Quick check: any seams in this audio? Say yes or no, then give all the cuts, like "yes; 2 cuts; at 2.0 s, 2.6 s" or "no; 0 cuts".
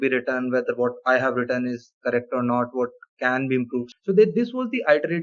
yes; 1 cut; at 3.9 s